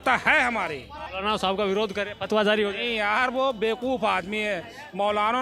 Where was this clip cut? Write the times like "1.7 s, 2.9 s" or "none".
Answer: 1.1 s